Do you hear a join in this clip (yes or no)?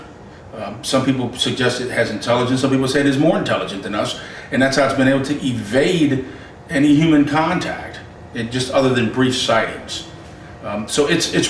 no